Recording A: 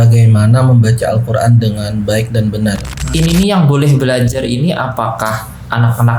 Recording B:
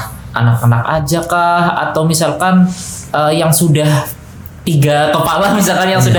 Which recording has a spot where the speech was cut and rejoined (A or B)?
A